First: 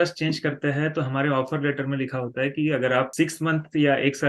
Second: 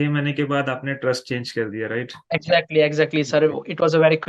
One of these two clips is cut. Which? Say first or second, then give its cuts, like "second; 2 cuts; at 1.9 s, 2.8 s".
first; 1 cut; at 3.1 s